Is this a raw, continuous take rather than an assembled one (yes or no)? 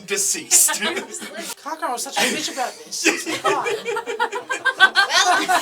no